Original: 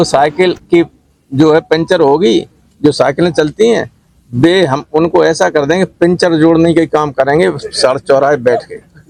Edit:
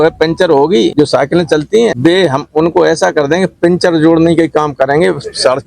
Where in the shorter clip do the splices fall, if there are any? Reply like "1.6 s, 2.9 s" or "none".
0.9 s, 2.0 s